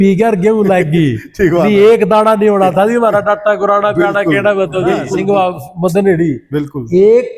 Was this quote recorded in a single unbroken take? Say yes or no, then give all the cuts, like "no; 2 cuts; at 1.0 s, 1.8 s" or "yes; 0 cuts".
yes; 0 cuts